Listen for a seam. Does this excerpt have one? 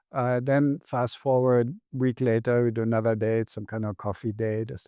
yes; 1 cut; at 1.8 s

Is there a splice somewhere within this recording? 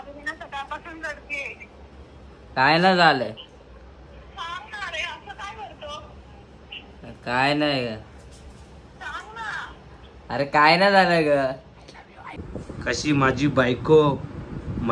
yes; 1 cut; at 12.4 s

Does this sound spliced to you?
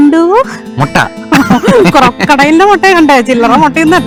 no; 0 cuts

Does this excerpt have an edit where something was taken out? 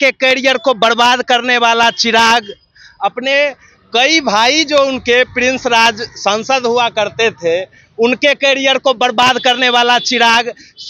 no; 0 cuts

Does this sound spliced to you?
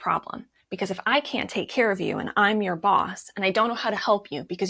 no; 0 cuts

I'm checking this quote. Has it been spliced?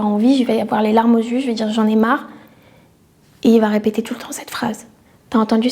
no; 0 cuts

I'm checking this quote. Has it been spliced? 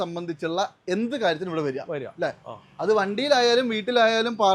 no; 0 cuts

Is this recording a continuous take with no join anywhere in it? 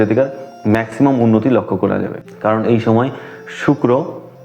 yes; 0 cuts

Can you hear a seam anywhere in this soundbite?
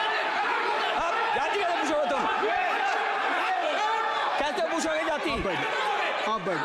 no; 0 cuts

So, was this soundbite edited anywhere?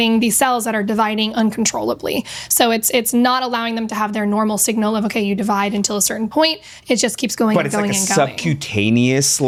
no; 0 cuts

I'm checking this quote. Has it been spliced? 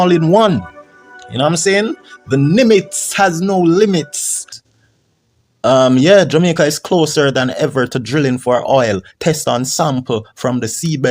yes; 1 cut; at 4.6 s

